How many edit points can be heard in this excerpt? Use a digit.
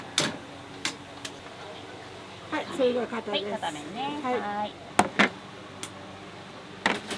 2